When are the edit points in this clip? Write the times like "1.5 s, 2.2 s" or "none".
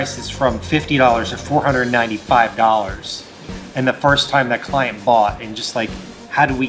none